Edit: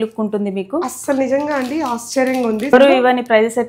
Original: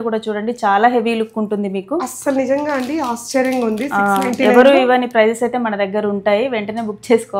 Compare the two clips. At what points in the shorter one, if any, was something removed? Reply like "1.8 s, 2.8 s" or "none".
2.7 s

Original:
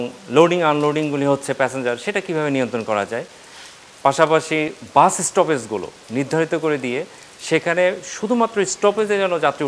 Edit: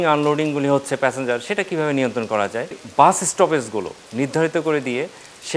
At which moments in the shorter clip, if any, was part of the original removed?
2.8 s

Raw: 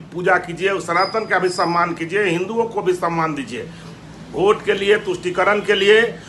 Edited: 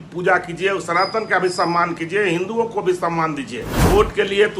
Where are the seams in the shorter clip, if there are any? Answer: 3.7 s

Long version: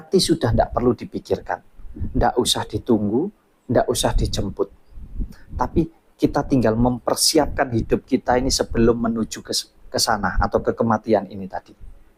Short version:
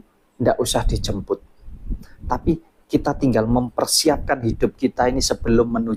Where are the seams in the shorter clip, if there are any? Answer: none

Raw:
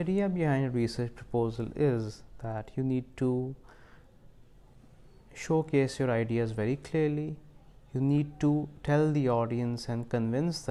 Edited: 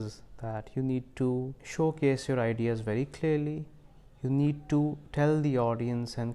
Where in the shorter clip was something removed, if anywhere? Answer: 1.6 s

